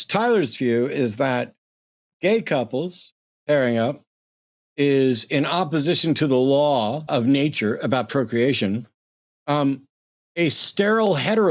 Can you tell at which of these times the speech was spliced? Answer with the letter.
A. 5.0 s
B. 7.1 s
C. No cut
B